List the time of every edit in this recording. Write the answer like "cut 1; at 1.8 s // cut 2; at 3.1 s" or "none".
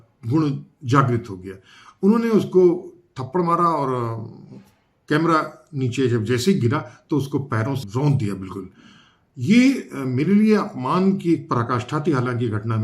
cut 1; at 7.8 s